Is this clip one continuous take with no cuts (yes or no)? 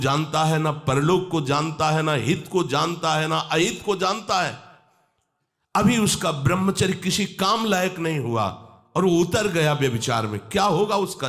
yes